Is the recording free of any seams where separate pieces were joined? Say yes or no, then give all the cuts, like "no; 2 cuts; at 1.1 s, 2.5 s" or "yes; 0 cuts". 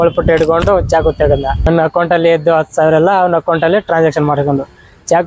no; 1 cut; at 1.6 s